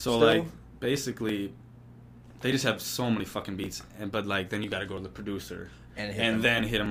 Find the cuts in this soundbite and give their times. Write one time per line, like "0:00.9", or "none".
none